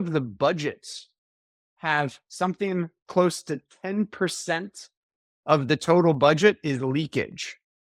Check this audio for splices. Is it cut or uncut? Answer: uncut